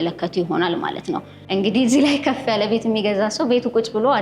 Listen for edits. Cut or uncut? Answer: cut